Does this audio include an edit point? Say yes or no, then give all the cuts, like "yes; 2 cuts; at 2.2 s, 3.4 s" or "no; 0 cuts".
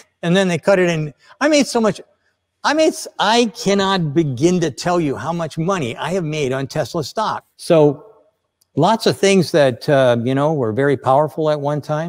yes; 1 cut; at 7.4 s